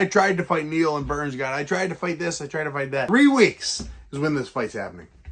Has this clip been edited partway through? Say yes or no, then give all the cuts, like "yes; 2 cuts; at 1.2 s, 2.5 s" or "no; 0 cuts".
yes; 1 cut; at 3.1 s